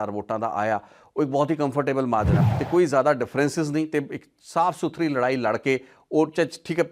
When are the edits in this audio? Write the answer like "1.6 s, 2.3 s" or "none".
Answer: 2.4 s